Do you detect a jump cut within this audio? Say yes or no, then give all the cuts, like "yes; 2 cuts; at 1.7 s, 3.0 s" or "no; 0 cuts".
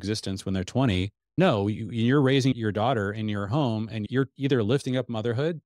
yes; 3 cuts; at 1.4 s, 2.5 s, 4.1 s